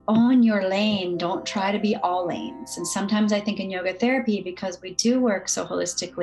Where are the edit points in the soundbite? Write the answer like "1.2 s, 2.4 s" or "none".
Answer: none